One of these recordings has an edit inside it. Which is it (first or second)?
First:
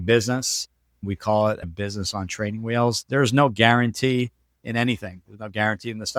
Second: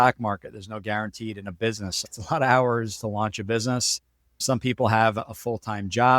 second